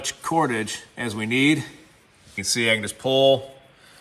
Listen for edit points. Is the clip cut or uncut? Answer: cut